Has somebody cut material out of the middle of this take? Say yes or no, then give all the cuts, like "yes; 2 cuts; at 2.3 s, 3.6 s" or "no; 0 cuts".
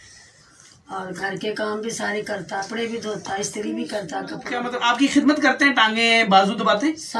yes; 2 cuts; at 2.7 s, 4.6 s